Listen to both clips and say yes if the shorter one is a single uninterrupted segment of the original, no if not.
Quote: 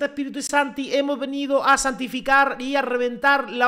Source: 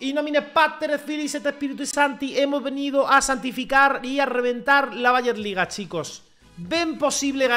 yes